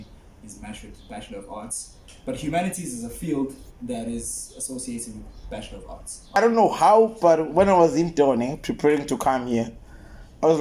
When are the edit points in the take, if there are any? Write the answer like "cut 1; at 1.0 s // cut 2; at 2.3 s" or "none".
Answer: cut 1; at 6.4 s